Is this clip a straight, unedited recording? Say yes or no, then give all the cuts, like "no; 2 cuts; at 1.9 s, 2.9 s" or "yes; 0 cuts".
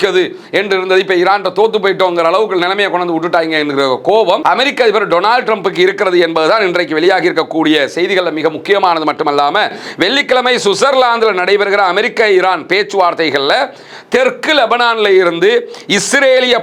yes; 0 cuts